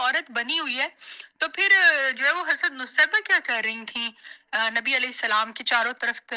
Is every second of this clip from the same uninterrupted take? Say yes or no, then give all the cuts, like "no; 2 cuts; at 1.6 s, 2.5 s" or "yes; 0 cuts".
yes; 0 cuts